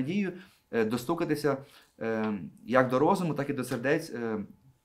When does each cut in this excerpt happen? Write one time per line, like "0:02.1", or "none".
none